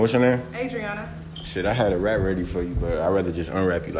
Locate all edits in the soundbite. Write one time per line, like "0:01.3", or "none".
none